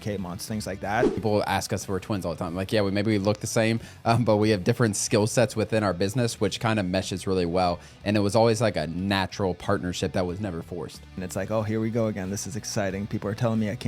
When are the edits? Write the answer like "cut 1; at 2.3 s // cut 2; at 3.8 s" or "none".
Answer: cut 1; at 1.2 s // cut 2; at 11.2 s